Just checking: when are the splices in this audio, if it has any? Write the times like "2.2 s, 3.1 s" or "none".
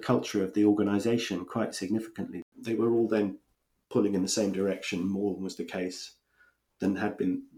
2.5 s